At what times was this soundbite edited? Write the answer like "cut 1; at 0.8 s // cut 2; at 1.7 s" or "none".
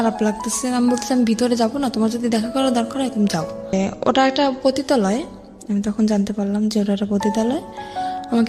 cut 1; at 3.7 s